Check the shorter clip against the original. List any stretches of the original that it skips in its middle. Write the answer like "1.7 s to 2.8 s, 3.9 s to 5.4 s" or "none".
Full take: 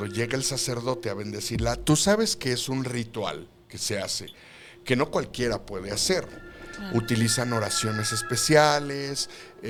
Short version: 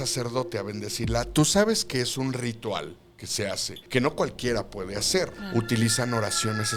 4.3 s to 4.7 s, 6.3 s to 6.8 s